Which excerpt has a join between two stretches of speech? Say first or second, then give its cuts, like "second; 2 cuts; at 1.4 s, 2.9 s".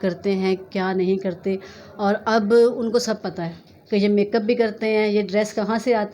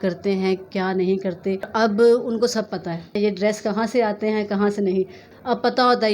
second; 3 cuts; at 1.7 s, 3.2 s, 5.2 s